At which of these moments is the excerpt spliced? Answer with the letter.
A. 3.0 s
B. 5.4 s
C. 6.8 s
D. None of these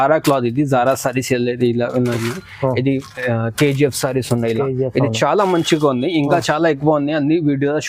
D